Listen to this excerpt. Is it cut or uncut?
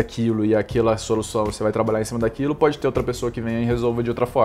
uncut